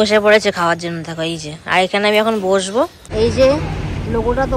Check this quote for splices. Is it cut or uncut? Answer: cut